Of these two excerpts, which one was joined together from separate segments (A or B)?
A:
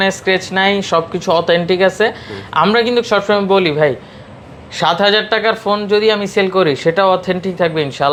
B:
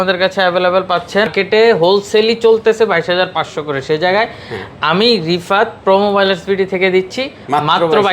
B